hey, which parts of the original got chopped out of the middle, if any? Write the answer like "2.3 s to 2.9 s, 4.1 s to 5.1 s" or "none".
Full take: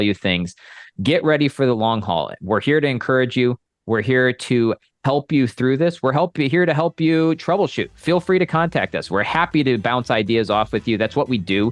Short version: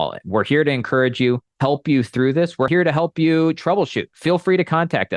3.7 s to 4.9 s, 6.1 s to 6.5 s